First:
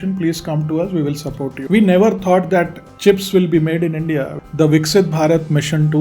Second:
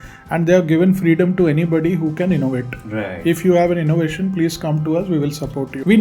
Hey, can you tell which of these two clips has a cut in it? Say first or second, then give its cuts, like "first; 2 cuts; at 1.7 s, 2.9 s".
first; 2 cuts; at 2.8 s, 4.4 s